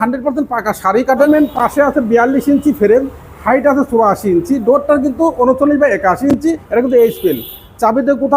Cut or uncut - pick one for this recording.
cut